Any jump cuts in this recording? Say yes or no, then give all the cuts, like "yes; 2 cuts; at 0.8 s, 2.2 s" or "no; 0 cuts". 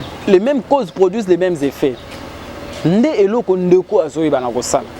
no; 0 cuts